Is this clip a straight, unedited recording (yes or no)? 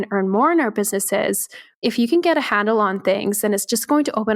no